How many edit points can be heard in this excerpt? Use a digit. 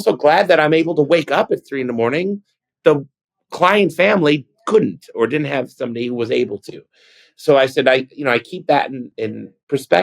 1